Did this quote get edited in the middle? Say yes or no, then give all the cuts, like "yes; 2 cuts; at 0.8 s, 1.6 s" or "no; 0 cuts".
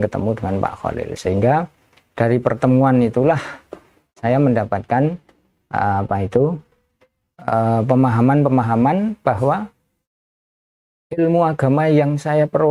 no; 0 cuts